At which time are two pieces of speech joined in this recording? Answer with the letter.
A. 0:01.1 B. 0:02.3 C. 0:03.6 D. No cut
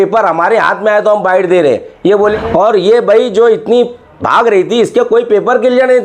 B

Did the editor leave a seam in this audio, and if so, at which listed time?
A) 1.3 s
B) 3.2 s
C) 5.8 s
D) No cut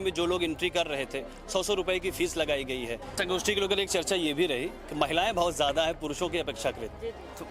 B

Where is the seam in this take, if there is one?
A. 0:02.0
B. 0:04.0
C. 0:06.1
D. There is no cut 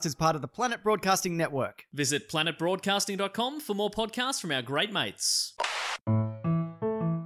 C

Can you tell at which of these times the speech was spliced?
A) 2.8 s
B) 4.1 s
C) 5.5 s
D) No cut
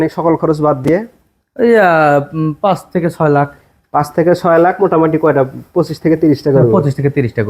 D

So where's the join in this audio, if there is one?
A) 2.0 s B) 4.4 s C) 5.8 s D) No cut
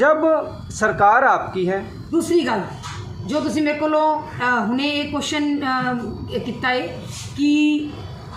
A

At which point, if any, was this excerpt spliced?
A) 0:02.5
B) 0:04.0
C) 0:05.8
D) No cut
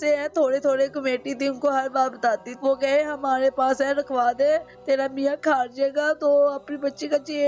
A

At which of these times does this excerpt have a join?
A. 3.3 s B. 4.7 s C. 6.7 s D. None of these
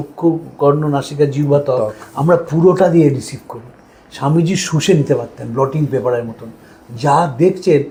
D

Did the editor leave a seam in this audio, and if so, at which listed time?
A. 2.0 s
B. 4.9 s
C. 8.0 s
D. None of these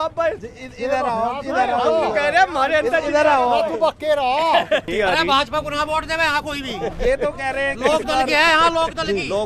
B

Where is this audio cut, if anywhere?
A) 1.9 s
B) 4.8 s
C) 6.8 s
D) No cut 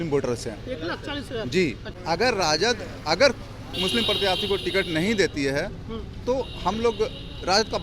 A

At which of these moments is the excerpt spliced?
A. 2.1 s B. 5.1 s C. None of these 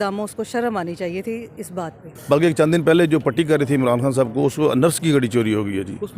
A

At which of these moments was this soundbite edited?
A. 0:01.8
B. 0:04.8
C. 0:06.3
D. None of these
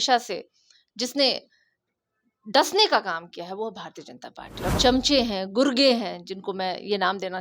B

